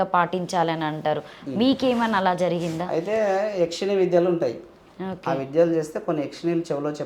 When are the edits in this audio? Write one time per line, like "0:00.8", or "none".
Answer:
none

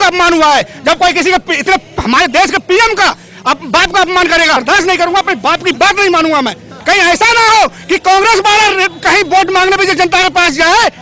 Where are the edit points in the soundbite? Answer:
0:04.6
0:06.7

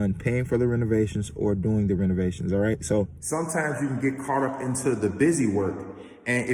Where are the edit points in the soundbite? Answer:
0:03.1

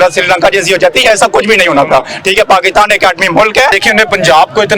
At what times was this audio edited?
0:03.8

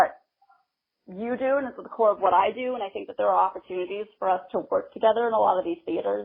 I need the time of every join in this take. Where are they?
none

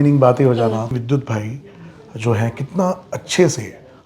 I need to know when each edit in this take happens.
0:00.9

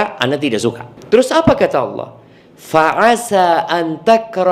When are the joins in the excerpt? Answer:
0:00.9

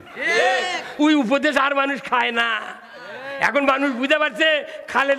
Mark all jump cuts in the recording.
0:01.0

